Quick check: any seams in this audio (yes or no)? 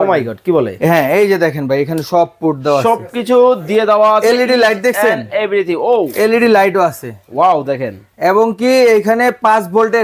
no